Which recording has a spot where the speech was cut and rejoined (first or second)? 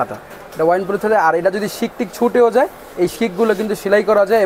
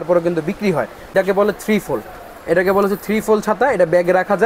second